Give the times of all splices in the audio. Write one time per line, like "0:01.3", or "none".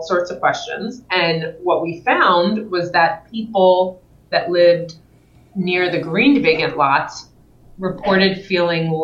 none

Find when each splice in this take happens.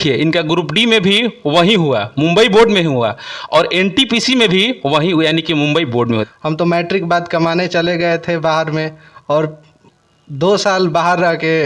0:06.3

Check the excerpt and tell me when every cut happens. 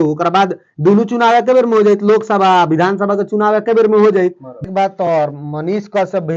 0:04.5

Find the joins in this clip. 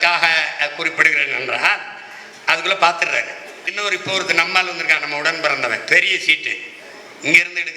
0:03.7

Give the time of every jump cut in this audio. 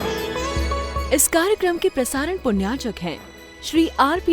0:01.0

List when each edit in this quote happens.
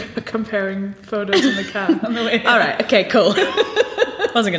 none

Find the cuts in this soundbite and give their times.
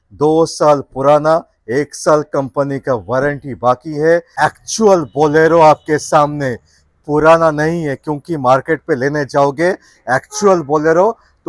0:04.3

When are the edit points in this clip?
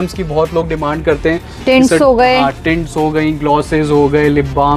none

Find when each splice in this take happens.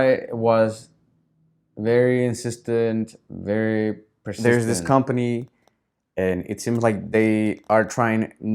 0:04.3

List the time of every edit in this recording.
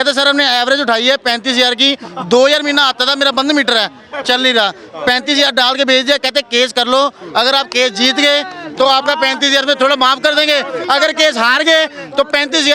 none

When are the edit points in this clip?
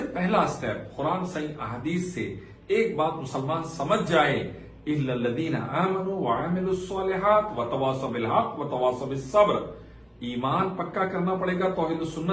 none

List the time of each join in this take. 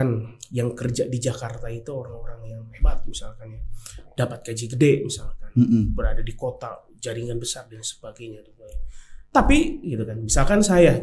none

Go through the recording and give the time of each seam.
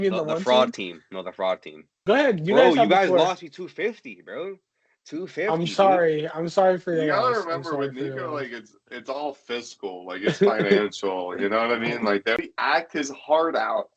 0:01.9
0:12.4

